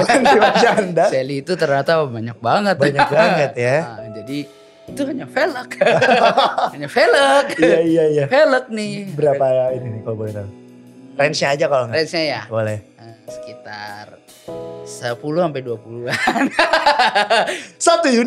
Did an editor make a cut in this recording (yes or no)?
no